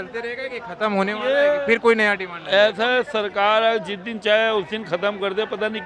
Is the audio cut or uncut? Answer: uncut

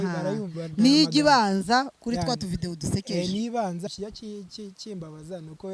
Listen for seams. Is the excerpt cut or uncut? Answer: cut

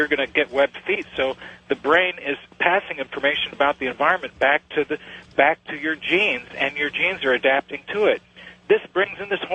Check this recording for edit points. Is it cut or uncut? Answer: cut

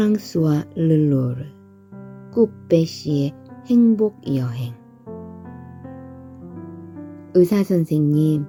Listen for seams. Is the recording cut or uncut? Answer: uncut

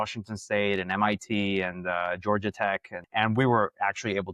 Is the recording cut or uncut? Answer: cut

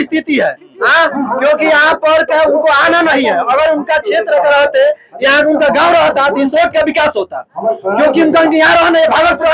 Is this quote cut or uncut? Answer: uncut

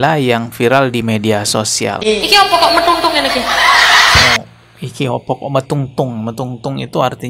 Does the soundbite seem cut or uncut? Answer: cut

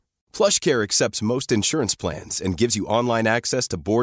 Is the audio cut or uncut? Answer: uncut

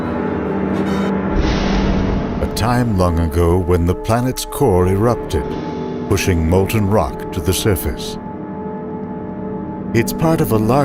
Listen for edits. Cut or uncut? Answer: uncut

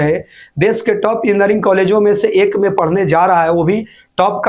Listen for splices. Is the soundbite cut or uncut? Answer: uncut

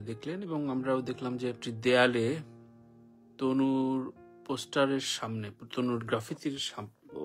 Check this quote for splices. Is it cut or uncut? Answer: uncut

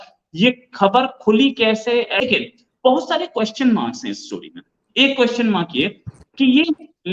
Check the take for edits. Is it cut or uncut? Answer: cut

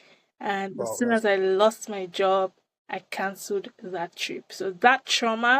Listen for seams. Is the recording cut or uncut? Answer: uncut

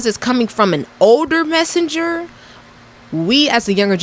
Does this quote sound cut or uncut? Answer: uncut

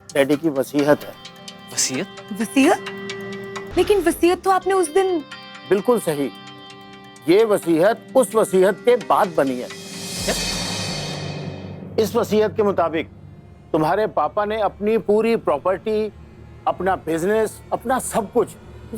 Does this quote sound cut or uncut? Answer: cut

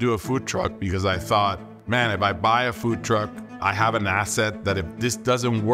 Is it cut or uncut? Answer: cut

